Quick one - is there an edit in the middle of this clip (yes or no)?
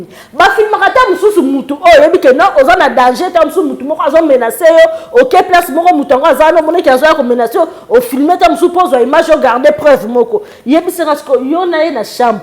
no